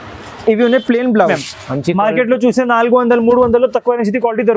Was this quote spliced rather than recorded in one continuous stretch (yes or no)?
yes